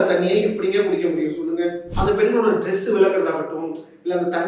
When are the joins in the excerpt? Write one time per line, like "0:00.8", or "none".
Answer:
0:01.9